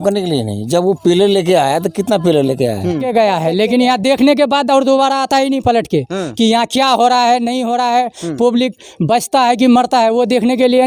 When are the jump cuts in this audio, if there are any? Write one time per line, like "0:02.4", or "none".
0:03.0